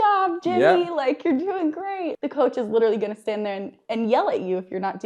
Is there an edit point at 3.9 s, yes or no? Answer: no